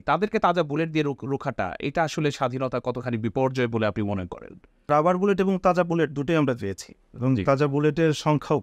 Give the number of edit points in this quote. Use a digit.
1